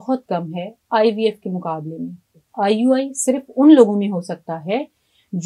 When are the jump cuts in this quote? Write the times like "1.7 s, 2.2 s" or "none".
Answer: 2.4 s